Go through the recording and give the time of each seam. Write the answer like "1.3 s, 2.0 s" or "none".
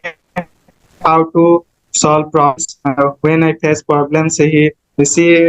none